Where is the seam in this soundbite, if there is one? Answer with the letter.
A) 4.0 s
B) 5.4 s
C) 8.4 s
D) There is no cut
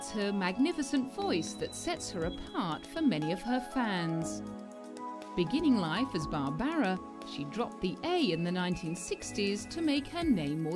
C